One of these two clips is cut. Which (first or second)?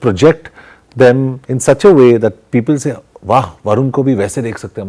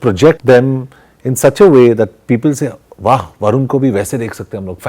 second